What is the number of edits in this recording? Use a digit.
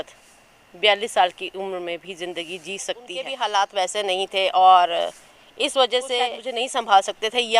2